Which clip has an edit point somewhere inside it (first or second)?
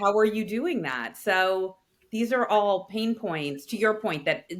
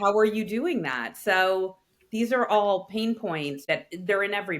second